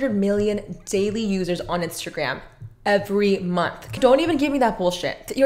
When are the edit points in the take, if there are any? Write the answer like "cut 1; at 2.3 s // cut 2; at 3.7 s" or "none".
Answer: cut 1; at 4.0 s